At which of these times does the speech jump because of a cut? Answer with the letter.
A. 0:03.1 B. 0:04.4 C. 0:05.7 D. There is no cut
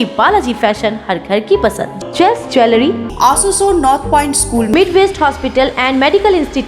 A